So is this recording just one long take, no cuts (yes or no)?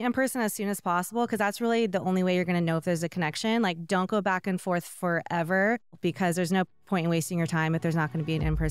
no